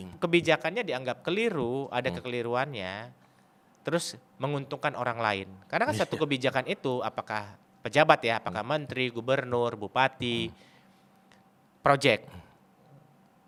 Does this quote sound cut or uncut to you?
uncut